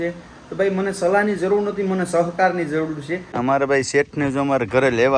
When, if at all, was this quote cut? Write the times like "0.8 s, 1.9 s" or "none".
3.3 s